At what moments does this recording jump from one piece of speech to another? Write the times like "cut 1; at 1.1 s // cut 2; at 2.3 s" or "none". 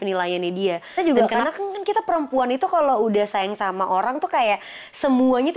cut 1; at 1.0 s

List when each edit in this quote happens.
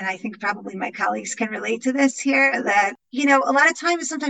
cut 1; at 3.0 s

